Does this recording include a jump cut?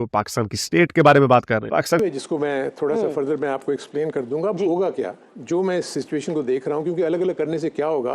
yes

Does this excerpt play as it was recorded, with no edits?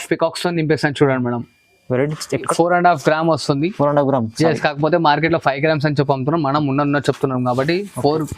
no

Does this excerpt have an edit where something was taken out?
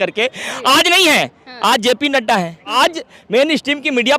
yes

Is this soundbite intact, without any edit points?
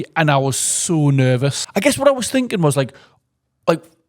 no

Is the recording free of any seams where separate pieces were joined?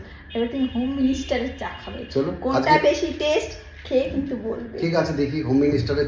yes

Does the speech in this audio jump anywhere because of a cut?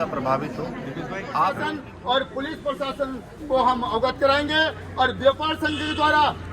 yes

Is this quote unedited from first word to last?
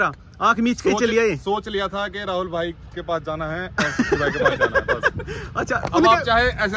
yes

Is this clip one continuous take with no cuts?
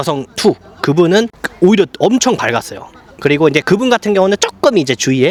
yes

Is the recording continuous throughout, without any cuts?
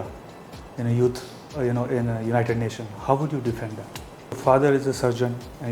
no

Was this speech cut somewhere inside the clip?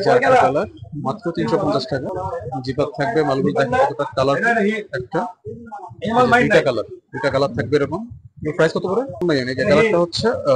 yes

